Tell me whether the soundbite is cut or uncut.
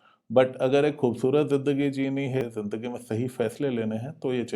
cut